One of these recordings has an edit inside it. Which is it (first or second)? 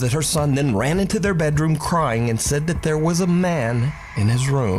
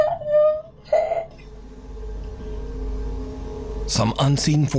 second